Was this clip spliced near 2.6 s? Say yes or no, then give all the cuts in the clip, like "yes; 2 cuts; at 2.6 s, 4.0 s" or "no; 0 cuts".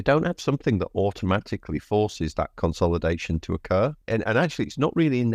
no; 1 cut; at 4.0 s